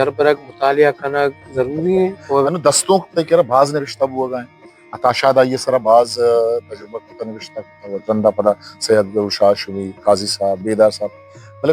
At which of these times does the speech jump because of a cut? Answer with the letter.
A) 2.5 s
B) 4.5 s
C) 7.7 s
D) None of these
A